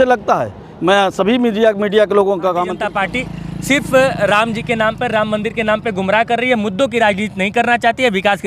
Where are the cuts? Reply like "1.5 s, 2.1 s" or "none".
2.8 s